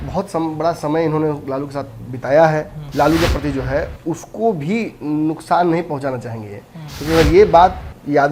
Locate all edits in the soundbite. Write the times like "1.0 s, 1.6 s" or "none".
2.8 s